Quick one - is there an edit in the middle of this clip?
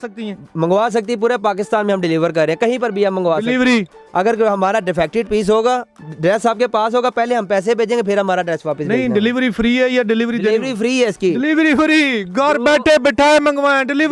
no; 0 cuts

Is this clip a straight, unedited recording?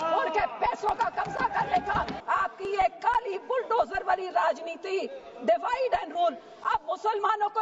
no; 1 cut; at 2.2 s

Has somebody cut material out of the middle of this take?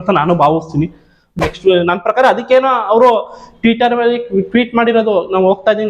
yes; 1 cut; at 1.4 s

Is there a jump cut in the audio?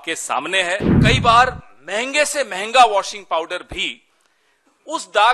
yes; 1 cut; at 1.0 s

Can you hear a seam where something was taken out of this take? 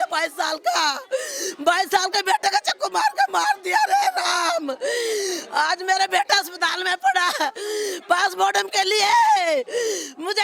no; 0 cuts

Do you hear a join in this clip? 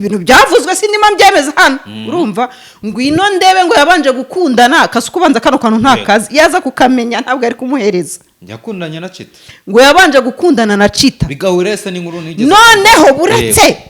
no; 0 cuts

